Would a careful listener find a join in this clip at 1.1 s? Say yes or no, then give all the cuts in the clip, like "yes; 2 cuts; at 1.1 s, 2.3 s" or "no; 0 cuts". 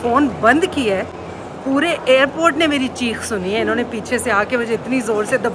no; 0 cuts